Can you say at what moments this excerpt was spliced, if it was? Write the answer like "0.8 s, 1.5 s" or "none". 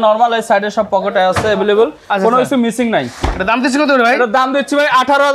none